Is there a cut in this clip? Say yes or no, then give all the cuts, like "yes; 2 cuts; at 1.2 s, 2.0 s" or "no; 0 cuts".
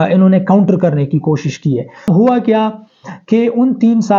yes; 1 cut; at 2.1 s